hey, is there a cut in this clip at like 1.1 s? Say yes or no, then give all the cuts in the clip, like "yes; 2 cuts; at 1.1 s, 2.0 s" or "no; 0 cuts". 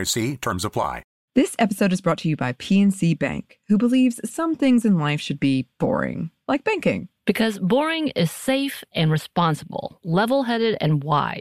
yes; 1 cut; at 1.1 s